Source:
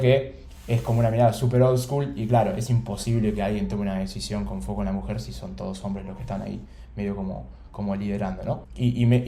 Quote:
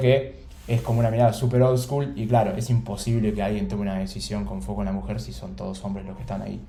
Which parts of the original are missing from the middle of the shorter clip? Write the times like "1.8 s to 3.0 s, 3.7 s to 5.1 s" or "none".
none